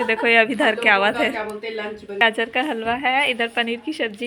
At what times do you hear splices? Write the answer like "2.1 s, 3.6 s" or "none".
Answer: 2.2 s